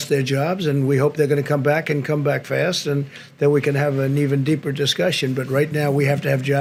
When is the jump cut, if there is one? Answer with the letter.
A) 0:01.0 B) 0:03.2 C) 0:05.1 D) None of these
D